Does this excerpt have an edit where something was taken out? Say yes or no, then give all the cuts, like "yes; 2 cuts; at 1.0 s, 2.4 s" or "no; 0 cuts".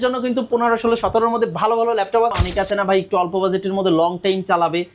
yes; 1 cut; at 2.3 s